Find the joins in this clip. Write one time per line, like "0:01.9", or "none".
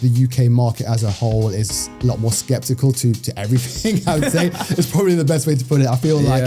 none